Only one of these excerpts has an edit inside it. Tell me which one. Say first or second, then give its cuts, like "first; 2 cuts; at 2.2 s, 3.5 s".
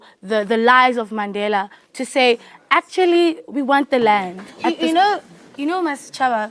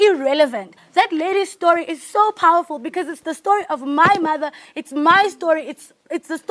first; 1 cut; at 4.5 s